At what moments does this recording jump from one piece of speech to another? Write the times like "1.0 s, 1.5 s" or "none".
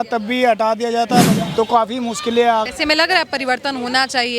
1.3 s, 2.7 s